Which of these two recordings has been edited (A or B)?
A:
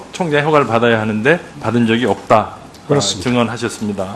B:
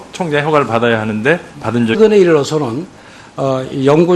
A